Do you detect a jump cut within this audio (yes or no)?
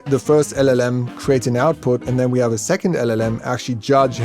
no